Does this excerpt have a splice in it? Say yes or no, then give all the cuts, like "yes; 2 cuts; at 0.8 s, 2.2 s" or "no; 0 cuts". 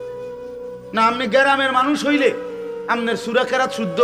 yes; 1 cut; at 0.9 s